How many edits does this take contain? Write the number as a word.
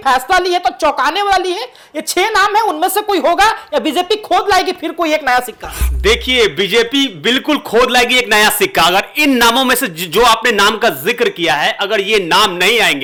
zero